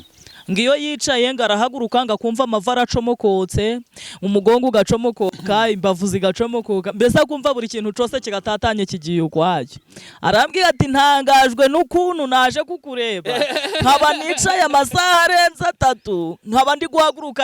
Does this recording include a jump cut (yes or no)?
no